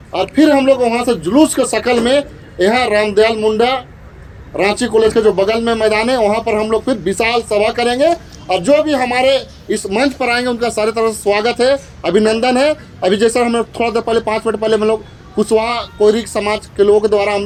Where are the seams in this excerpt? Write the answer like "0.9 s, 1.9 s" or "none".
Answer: none